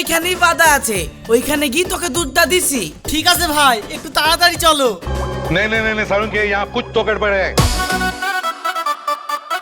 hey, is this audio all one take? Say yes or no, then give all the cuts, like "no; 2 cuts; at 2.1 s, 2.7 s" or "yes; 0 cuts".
yes; 0 cuts